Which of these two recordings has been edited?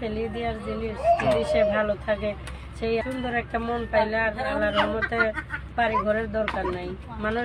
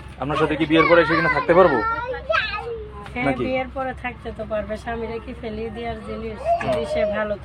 first; 1 cut; at 3.0 s

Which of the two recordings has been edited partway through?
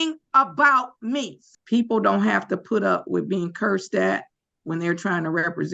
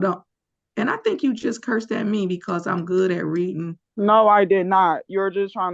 first; 1 cut; at 1.4 s

